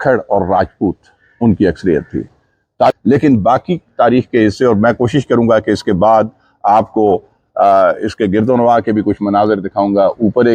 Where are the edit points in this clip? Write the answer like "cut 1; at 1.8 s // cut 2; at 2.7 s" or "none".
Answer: cut 1; at 2.9 s